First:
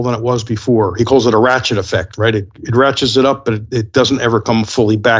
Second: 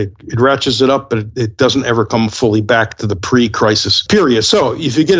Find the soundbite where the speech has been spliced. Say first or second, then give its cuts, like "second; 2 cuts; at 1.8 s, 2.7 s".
second; 1 cut; at 4.0 s